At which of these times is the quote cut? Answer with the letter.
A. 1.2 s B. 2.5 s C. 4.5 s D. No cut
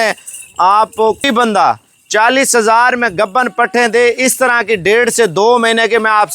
A